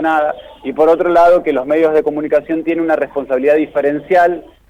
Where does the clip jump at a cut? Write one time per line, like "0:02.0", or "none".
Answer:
none